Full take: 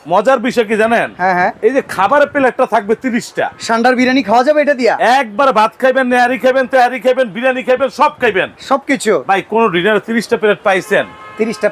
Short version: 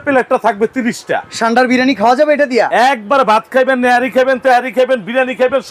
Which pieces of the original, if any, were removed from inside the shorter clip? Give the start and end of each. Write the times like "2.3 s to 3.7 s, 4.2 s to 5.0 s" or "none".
none